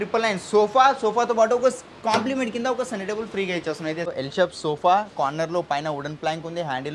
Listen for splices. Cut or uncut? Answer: cut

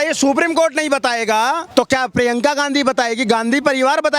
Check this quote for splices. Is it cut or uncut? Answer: cut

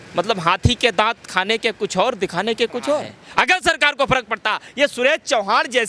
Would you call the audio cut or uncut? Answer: cut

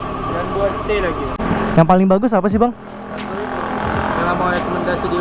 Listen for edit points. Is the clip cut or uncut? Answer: uncut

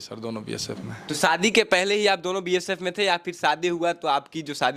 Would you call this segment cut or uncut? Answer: uncut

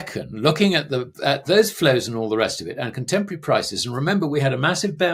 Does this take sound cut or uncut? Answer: uncut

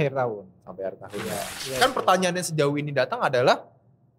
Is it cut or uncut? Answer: cut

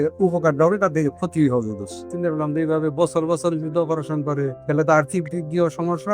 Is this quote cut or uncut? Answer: cut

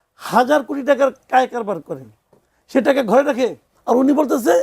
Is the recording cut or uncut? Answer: cut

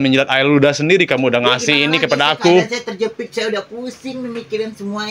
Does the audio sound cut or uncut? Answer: uncut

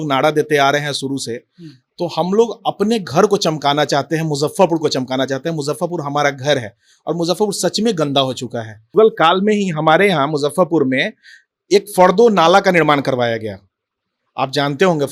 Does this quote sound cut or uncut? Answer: cut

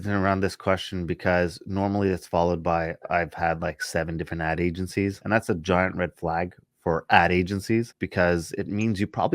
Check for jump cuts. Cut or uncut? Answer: cut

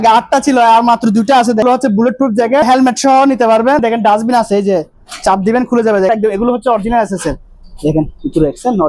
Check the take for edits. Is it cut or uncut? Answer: cut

